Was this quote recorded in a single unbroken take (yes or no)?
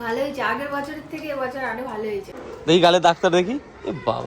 no